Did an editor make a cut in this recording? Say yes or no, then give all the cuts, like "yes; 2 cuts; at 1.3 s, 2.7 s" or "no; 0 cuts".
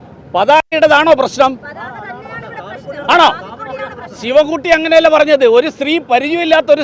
no; 0 cuts